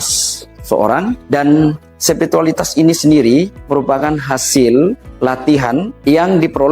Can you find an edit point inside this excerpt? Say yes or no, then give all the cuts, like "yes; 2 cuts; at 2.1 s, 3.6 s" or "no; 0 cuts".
yes; 4 cuts; at 1.2 s, 1.9 s, 3.6 s, 5.6 s